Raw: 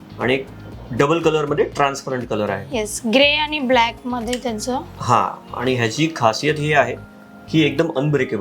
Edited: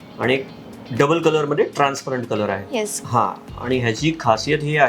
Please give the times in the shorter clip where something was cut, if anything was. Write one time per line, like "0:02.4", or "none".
0:03.0